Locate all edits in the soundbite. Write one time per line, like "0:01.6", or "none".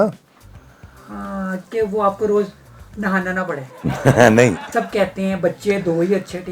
0:04.7